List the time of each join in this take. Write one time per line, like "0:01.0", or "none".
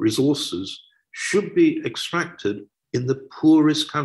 0:02.7